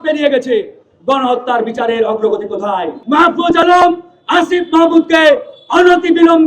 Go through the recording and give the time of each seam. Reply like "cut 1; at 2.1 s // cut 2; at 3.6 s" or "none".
cut 1; at 3.0 s